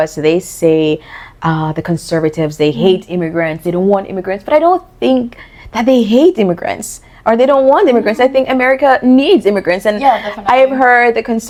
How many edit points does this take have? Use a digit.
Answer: 0